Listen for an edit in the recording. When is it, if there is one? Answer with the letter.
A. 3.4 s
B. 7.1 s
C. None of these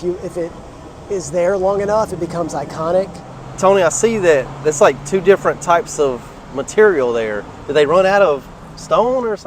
A